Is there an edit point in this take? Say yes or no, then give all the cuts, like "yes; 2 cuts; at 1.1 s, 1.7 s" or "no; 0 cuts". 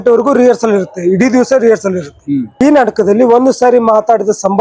yes; 1 cut; at 2.5 s